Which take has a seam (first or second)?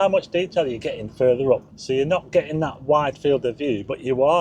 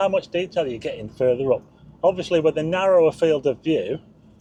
first